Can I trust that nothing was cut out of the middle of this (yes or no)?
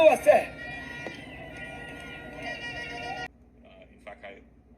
no